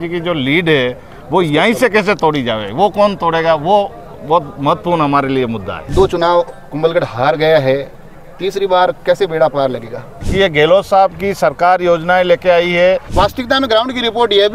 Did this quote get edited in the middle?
yes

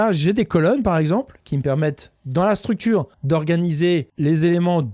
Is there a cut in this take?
yes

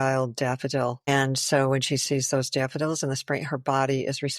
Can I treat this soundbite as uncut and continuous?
no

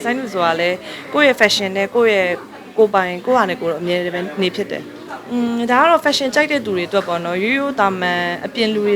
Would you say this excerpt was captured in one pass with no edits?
yes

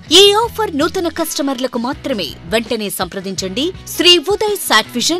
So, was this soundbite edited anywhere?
yes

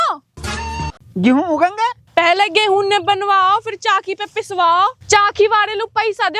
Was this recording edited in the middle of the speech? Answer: yes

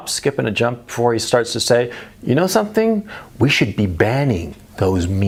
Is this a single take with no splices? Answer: yes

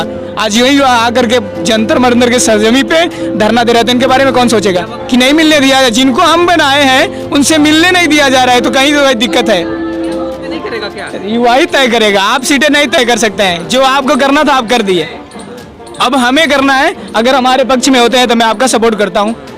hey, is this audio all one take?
no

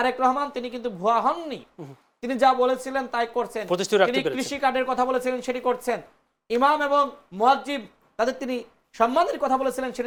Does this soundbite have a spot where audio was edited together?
no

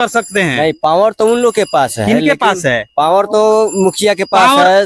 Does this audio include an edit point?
no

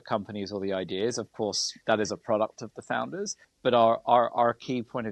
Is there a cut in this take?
yes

